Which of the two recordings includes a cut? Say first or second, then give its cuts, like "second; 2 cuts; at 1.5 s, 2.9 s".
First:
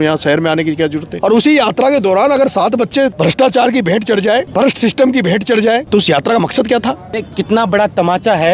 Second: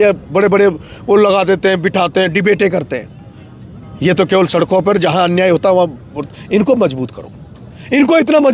first; 5 cuts; at 1.1 s, 3.1 s, 4.5 s, 5.8 s, 7.1 s